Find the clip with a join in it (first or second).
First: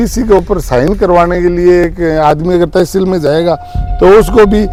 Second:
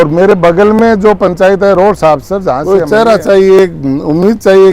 second